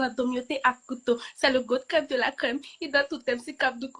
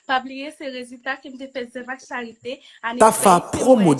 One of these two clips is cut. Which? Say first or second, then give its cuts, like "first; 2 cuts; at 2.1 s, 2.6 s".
second; 1 cut; at 3.0 s